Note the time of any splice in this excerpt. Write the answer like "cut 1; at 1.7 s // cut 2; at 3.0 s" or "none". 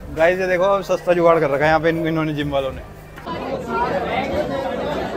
cut 1; at 3.3 s